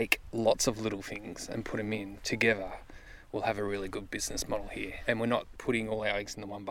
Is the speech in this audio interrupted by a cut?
yes; 2 cuts; at 5.0 s, 5.5 s

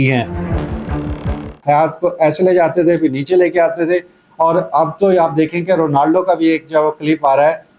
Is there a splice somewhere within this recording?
yes; 1 cut; at 1.3 s

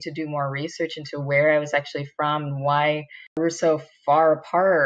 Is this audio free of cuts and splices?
no; 1 cut; at 3.4 s

